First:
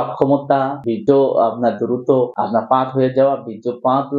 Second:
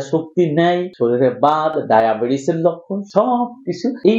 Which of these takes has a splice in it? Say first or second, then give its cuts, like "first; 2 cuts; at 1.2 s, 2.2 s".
first; 2 cuts; at 0.9 s, 2.4 s